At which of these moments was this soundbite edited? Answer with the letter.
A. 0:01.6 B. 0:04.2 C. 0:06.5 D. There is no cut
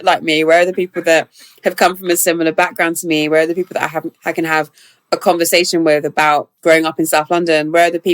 C